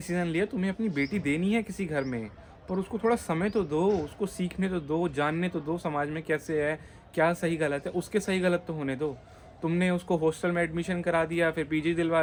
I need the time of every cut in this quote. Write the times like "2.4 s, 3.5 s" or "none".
none